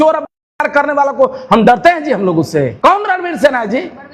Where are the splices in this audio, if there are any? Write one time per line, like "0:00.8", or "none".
0:02.7